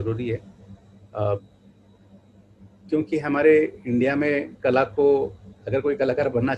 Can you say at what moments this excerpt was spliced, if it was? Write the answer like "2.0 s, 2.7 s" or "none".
none